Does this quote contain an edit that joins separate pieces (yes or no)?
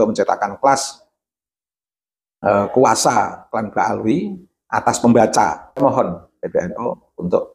yes